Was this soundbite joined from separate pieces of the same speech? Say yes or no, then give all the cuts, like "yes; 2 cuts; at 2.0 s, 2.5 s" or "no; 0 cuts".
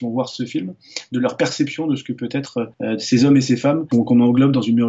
yes; 2 cuts; at 2.7 s, 3.9 s